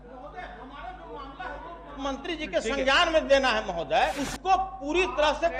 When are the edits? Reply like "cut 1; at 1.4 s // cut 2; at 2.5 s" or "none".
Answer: cut 1; at 4.2 s